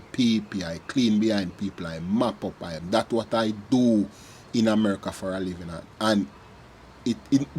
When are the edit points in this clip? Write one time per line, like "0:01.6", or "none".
0:02.7